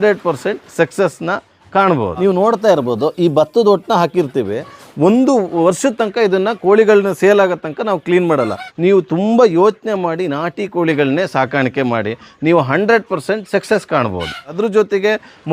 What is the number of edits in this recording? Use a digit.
3